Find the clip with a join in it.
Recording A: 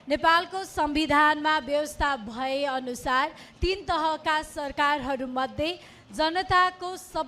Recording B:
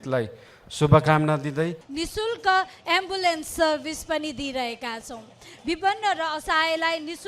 B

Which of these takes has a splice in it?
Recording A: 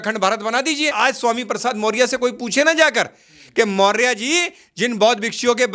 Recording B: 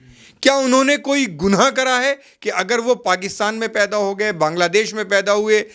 A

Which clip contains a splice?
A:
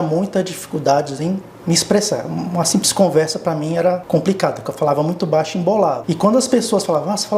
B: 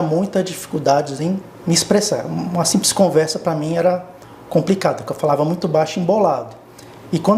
A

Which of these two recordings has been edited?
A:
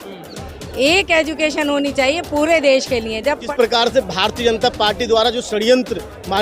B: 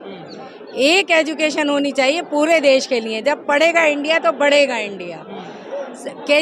A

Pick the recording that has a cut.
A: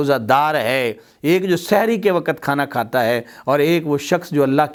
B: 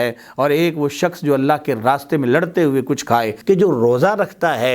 B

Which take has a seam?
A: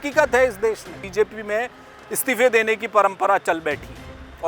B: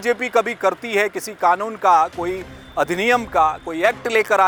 A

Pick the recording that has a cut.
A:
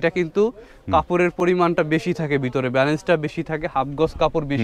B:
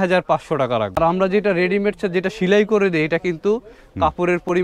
B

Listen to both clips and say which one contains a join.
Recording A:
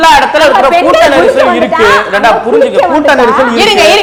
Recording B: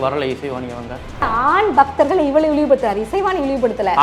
B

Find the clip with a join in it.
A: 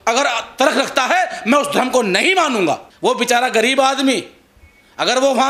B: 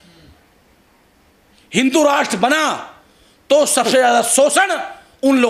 A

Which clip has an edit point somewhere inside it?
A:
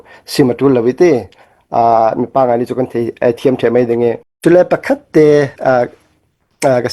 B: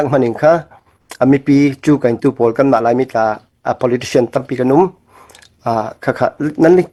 A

